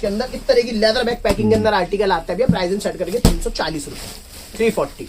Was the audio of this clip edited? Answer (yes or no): no